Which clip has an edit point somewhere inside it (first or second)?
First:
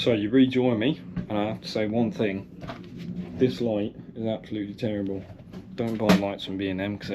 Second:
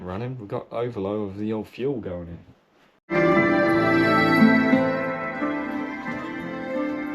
second